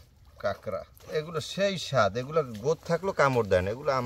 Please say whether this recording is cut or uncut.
cut